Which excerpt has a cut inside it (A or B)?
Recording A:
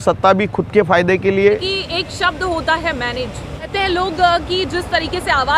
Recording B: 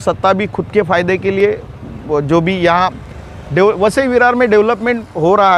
A